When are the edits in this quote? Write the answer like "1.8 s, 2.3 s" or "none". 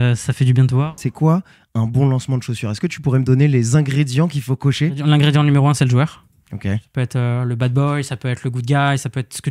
0.9 s, 5.0 s, 6.9 s